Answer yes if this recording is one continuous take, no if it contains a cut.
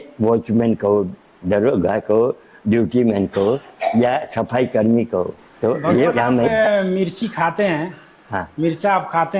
no